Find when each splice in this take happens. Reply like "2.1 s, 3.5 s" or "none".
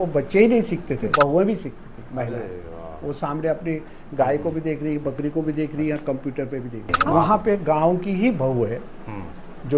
1.0 s, 7.0 s